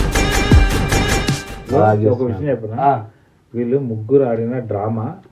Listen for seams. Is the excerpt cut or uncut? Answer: cut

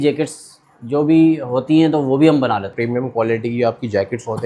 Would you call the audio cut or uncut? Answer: cut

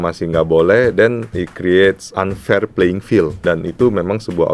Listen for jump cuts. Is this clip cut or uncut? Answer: cut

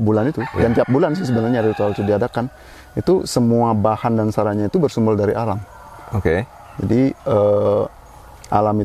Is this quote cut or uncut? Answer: uncut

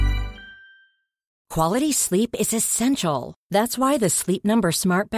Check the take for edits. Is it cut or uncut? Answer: cut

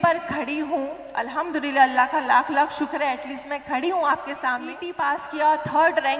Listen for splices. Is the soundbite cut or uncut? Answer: cut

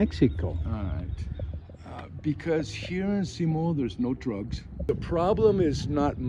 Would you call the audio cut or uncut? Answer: cut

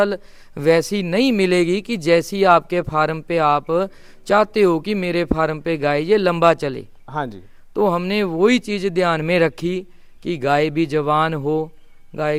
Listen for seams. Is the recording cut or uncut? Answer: uncut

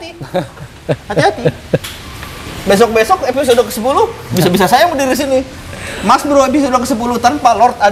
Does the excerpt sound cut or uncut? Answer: uncut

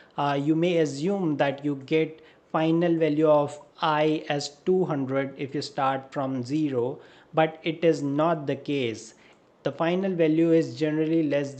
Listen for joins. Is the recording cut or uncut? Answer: uncut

